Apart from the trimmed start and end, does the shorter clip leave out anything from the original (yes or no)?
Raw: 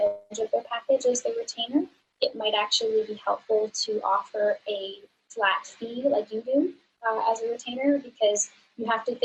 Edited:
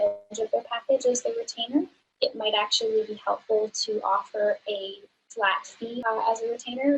yes